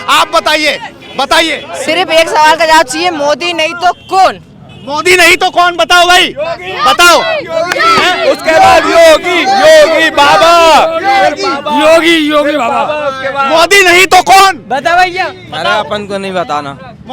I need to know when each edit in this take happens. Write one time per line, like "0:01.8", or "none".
0:01.9